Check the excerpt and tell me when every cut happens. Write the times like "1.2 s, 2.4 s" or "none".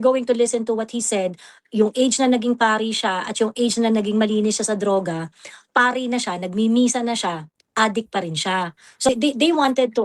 9.1 s